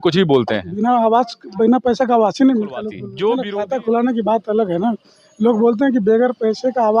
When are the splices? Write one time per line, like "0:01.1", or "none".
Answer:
0:03.3